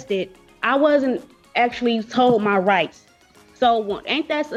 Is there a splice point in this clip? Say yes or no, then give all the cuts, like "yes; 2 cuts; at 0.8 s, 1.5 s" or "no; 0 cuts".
no; 0 cuts